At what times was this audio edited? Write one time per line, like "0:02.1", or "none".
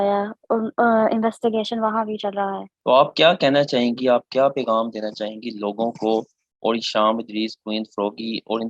0:02.7

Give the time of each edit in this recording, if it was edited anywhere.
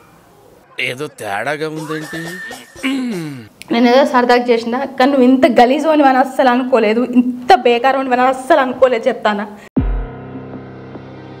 0:03.5

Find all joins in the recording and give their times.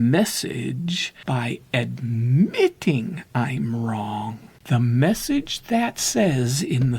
0:01.2
0:04.5

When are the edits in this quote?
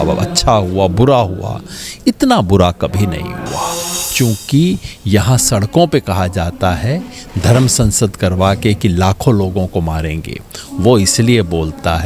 0:04.0

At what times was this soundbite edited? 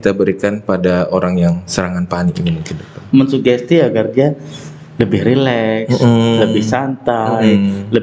0:03.0

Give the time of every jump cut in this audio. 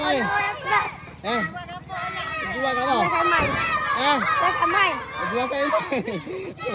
none

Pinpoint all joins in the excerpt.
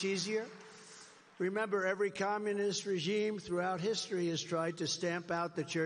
0:04.0

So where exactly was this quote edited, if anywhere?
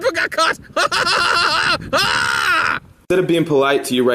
none

